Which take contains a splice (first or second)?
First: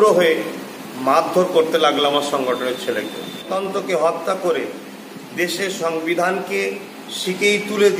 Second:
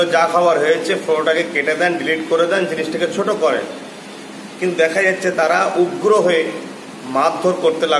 first